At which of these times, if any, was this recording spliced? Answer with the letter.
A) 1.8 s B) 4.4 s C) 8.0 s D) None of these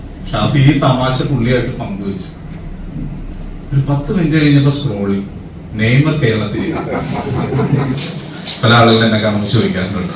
C